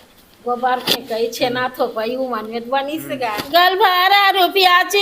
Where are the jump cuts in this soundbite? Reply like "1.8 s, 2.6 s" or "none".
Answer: 3.4 s